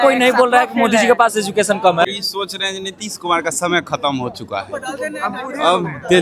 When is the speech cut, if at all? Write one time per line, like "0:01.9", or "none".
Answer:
0:02.1